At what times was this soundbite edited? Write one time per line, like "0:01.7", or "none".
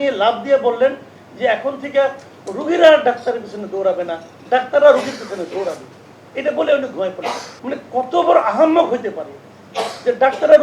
0:07.5